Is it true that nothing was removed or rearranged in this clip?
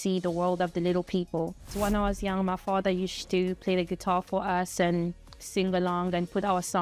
no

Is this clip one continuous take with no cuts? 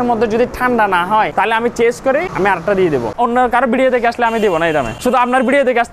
no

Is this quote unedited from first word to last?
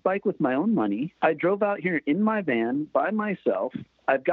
no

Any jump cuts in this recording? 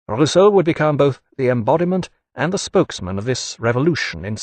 yes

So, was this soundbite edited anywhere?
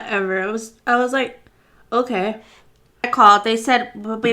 yes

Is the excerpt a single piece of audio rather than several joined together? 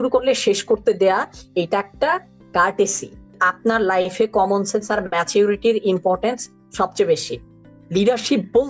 no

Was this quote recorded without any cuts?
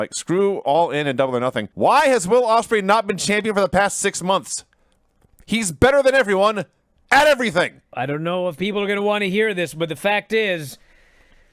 no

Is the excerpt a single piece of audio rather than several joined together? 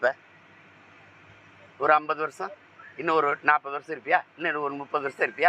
yes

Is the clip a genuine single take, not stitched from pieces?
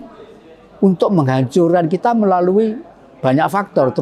yes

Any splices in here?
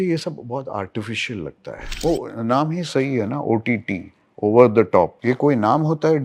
yes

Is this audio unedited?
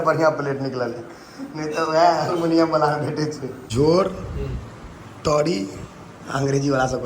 no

